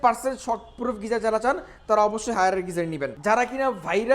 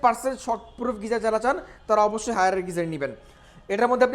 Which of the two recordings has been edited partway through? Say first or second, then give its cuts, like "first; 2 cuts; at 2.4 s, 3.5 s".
first; 1 cut; at 3.1 s